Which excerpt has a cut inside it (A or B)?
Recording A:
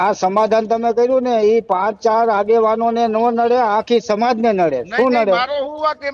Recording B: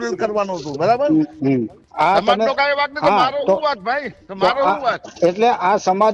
B